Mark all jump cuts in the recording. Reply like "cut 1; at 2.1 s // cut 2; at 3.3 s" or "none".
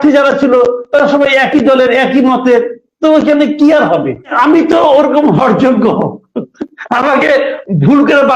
cut 1; at 4.3 s